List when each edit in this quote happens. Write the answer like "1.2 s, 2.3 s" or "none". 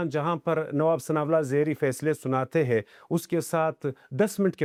none